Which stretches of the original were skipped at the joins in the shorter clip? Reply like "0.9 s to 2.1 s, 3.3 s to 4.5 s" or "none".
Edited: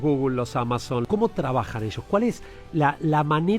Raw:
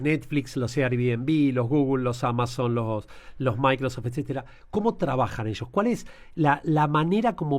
2.7 s to 4.7 s